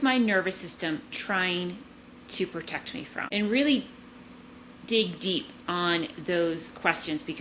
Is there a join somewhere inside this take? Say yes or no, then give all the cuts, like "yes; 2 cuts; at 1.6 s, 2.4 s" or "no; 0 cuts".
yes; 1 cut; at 3.3 s